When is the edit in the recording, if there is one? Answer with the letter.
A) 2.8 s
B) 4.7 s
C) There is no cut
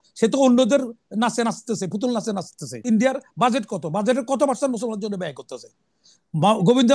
A